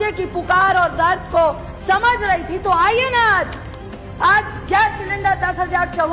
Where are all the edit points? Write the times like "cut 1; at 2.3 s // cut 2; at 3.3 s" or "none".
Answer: none